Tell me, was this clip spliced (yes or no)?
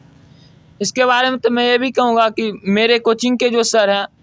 no